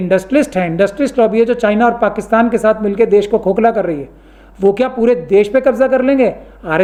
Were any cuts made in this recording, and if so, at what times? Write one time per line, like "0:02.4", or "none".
none